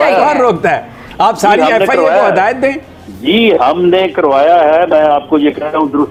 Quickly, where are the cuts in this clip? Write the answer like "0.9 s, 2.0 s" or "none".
none

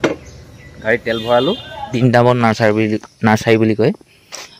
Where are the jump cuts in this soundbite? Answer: 2.0 s

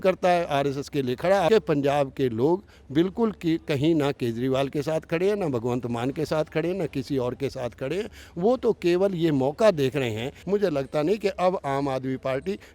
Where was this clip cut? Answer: 1.5 s, 10.3 s

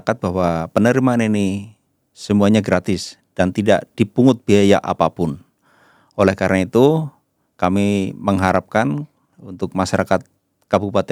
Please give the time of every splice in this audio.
none

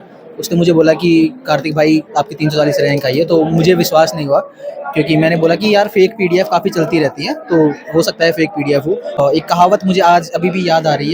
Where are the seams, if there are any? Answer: 9.2 s

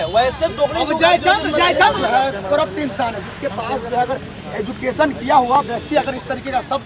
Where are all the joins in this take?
2.0 s

